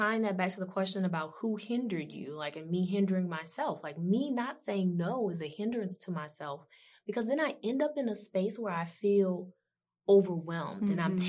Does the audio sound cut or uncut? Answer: uncut